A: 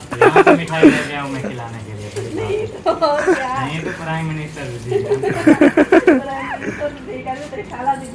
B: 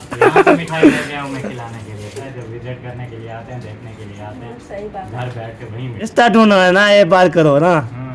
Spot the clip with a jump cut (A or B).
B